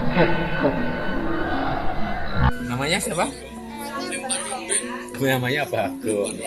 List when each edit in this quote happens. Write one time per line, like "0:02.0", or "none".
0:02.5